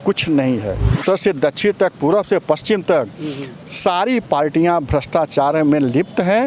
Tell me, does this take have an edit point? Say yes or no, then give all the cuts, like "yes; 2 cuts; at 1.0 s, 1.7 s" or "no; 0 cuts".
yes; 1 cut; at 1.0 s